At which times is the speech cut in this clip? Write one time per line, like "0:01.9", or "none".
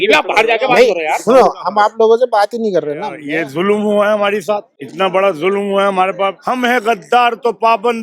0:03.2
0:04.8
0:06.4